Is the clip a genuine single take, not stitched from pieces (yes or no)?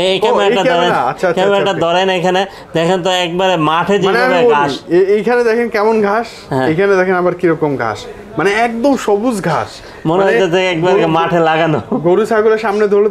yes